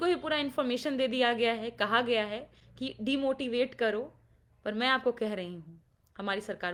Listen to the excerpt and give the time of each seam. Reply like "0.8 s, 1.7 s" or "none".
none